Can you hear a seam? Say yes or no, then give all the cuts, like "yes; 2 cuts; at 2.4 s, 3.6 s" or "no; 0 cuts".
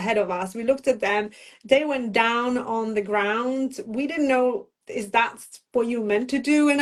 no; 0 cuts